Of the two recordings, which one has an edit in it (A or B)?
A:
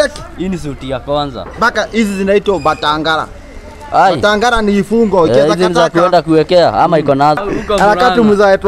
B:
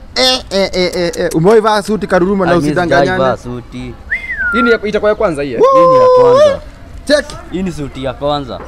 A